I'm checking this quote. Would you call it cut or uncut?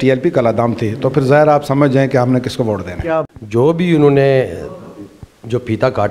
cut